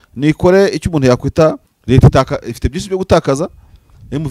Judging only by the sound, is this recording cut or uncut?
cut